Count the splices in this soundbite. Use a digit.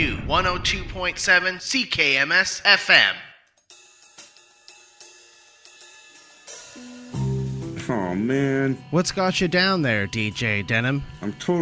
1